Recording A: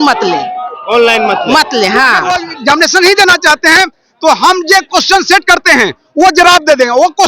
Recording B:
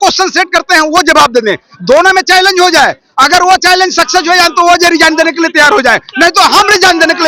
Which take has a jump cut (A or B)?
A